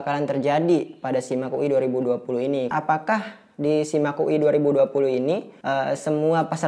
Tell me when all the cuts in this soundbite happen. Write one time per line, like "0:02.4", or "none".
0:02.7
0:05.5